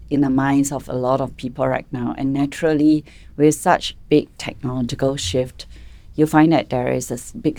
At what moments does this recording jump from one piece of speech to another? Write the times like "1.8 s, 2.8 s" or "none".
none